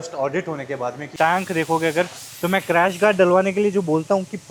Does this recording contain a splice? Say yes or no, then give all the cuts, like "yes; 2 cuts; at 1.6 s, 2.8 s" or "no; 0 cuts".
yes; 1 cut; at 1.0 s